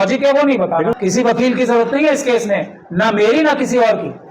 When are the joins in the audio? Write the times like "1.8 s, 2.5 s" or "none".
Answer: 0.9 s